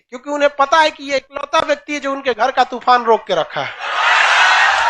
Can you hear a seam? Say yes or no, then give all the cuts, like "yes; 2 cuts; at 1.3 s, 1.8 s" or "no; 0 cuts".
no; 0 cuts